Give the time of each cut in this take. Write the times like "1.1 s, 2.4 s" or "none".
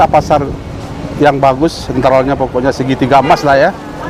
none